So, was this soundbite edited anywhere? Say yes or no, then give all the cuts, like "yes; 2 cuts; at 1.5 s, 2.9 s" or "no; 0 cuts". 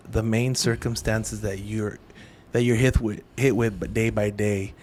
no; 0 cuts